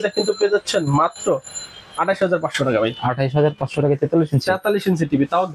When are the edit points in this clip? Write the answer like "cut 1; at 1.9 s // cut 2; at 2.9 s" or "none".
none